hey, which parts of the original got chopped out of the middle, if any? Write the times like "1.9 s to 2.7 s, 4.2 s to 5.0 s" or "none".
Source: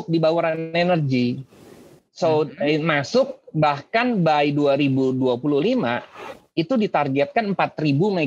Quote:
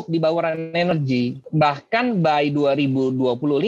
1.2 s to 3.2 s